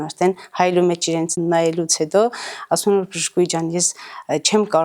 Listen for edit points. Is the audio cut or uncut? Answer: cut